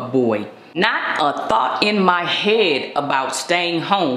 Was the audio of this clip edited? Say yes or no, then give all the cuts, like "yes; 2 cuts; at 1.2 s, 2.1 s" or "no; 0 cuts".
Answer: no; 0 cuts